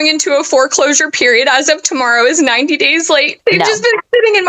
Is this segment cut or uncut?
cut